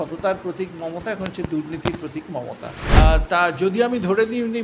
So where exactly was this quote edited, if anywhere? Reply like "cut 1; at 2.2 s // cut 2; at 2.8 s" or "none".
cut 1; at 3.0 s